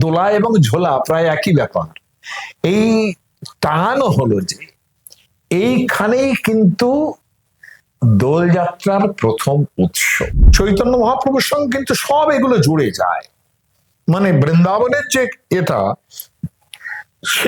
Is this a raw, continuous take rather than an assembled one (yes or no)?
no